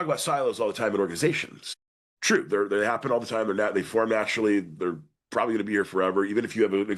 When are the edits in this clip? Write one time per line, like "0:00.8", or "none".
none